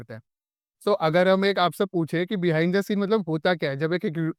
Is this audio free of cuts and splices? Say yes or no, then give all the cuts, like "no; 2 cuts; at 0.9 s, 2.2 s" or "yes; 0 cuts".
yes; 0 cuts